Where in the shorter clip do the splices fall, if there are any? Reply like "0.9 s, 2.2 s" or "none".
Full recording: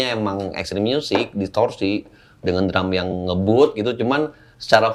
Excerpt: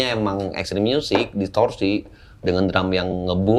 none

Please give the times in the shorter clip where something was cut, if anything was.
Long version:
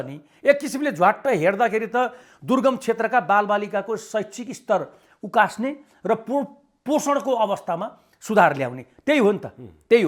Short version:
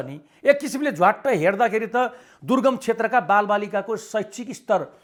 none

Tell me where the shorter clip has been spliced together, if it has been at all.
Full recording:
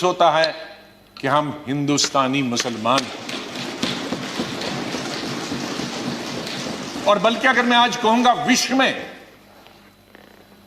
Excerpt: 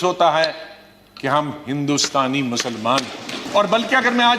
3.4 s

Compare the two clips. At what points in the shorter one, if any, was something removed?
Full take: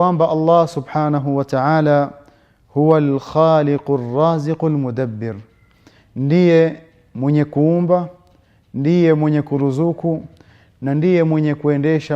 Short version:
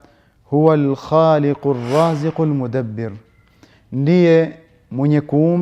none

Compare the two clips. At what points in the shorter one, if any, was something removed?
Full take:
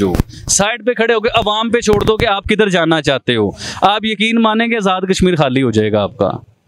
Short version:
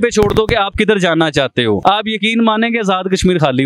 1.8 s

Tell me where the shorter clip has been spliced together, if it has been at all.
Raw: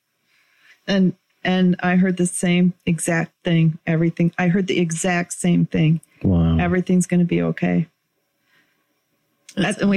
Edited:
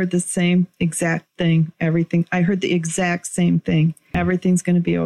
4.1 s

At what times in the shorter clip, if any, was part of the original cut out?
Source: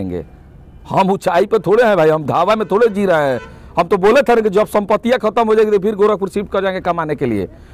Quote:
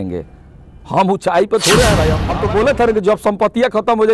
2.2 s

